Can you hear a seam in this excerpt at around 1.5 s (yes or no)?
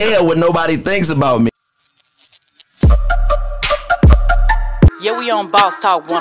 yes